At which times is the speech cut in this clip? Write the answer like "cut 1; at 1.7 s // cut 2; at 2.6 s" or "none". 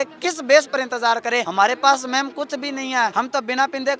cut 1; at 1.5 s // cut 2; at 3.1 s